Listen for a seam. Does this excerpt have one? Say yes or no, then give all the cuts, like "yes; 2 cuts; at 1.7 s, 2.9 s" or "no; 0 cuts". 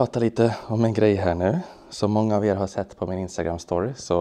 no; 0 cuts